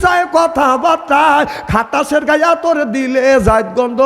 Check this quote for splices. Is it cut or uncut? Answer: uncut